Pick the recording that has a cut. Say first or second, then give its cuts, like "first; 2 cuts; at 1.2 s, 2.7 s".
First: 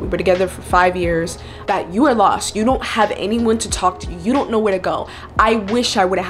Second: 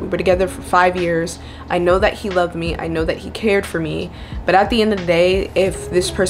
first; 1 cut; at 1.5 s